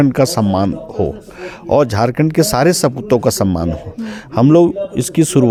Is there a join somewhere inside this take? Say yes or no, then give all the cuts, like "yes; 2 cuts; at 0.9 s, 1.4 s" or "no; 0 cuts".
no; 0 cuts